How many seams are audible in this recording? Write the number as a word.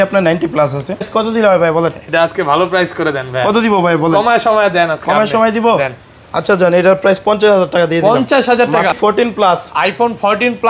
two